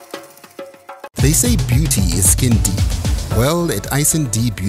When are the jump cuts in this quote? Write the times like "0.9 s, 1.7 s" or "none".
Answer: 1.0 s